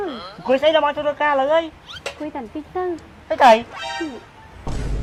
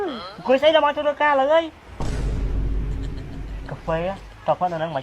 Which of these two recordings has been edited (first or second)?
second